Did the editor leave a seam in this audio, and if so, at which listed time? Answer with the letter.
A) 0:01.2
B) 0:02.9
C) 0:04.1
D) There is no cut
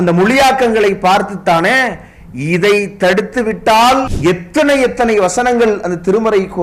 C